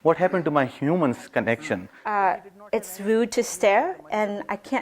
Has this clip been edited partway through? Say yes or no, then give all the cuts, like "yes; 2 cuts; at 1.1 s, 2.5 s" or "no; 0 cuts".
yes; 1 cut; at 1.9 s